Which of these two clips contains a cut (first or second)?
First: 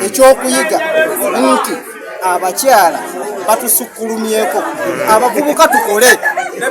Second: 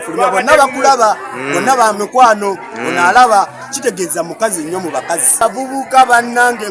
second